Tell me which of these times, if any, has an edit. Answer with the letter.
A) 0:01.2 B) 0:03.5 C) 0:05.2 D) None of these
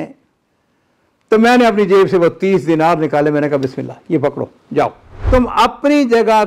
C